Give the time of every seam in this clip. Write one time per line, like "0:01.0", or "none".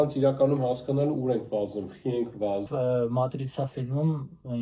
0:02.7